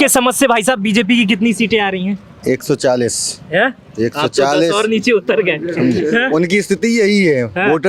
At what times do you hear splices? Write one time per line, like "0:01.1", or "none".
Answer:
none

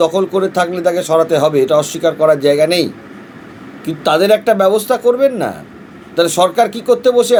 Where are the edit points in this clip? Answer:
none

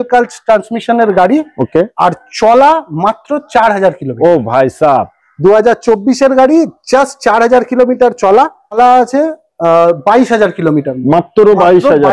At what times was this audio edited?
0:08.8

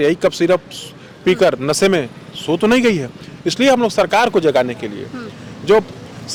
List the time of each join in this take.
none

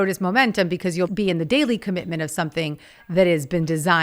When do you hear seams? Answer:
0:01.1

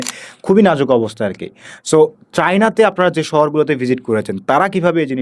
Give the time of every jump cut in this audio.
none

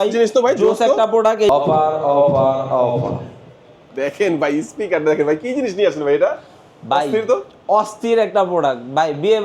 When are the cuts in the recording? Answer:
0:01.5

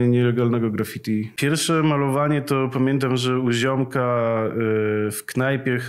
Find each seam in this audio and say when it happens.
0:01.3

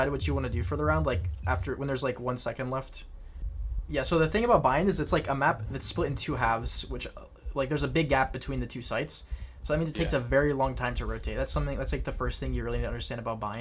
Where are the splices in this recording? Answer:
none

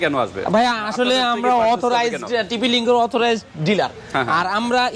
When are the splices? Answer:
none

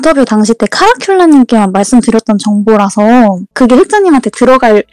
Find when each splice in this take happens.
0:03.5

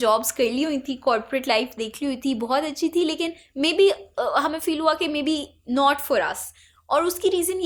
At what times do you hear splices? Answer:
none

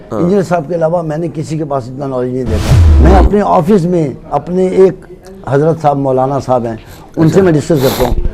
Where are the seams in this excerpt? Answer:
0:02.8

